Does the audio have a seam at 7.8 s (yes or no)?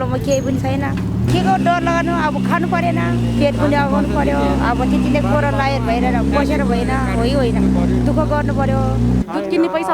no